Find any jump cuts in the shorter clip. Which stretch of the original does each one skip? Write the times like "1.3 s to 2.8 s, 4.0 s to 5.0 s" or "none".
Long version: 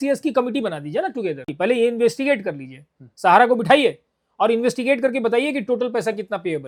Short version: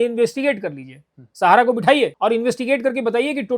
4.0 s to 4.3 s